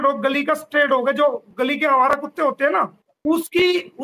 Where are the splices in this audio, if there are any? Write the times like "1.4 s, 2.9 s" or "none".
3.0 s